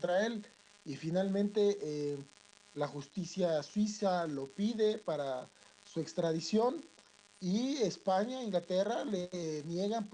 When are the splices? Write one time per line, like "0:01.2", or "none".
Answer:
0:02.2